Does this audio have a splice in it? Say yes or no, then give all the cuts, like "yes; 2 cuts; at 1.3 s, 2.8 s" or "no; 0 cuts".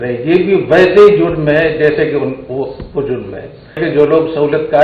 yes; 1 cut; at 3.8 s